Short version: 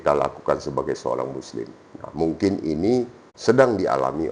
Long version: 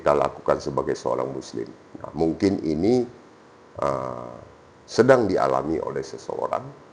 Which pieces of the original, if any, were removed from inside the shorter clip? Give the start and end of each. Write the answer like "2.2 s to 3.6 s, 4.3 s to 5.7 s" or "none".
3.2 s to 4.7 s